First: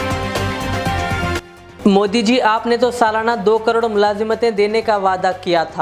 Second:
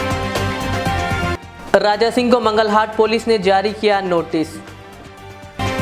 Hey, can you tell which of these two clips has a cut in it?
first; 1 cut; at 1.0 s

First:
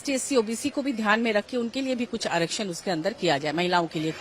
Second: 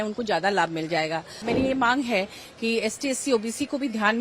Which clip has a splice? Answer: second; 1 cut; at 1.5 s

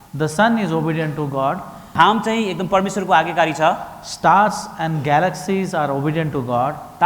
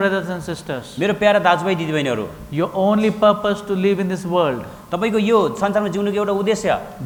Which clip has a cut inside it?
first; 1 cut; at 1.9 s

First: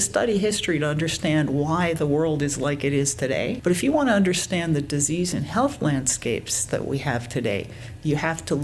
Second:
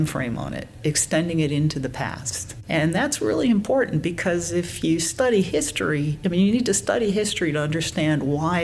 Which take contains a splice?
first; 1 cut; at 3.6 s

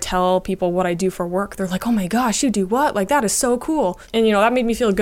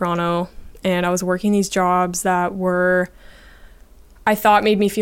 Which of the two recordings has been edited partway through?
first; 1 cut; at 4.0 s

